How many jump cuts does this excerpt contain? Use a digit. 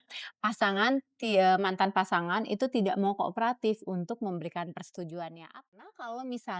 1